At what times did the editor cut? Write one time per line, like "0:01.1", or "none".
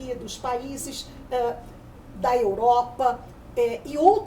none